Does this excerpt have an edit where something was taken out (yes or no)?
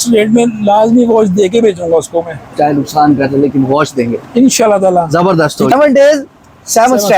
yes